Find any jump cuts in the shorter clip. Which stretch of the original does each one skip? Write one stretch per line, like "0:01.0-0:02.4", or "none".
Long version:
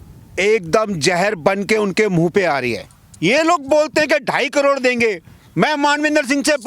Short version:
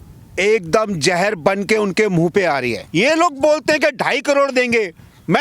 0:02.8-0:03.1